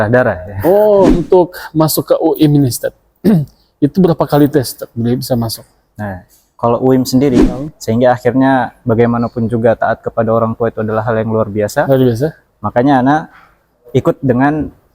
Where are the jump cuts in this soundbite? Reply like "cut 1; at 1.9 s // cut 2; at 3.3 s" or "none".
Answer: cut 1; at 1.1 s // cut 2; at 7.4 s